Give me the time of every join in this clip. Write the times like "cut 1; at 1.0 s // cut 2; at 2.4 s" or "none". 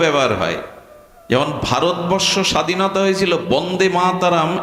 none